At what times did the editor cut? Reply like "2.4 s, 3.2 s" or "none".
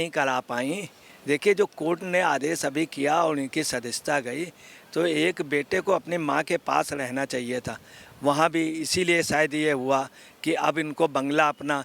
none